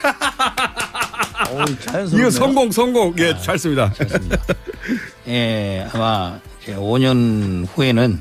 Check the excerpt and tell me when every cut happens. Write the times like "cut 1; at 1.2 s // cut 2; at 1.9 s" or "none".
cut 1; at 1.8 s

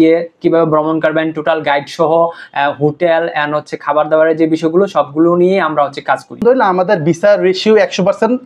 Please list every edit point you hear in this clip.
cut 1; at 6.4 s

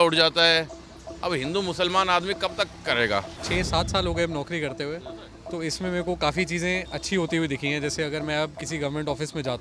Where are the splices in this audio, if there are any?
cut 1; at 3.4 s

